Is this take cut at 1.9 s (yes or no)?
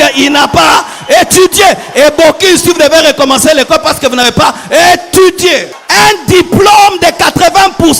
no